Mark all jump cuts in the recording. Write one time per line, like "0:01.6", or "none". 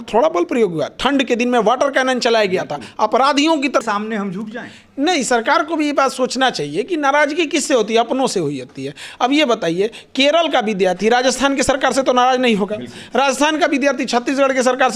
0:03.8